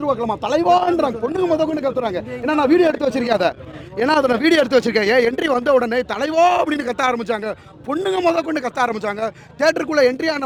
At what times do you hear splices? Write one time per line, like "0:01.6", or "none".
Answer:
none

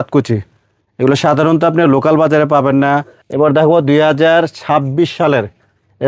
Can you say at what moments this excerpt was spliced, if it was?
0:03.2

